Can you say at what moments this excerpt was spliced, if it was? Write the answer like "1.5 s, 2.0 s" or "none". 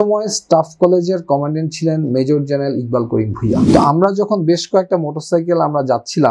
3.6 s